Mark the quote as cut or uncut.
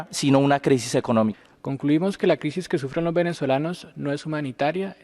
cut